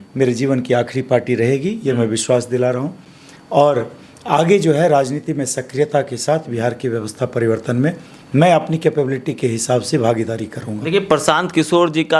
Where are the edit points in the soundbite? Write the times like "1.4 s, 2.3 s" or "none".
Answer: none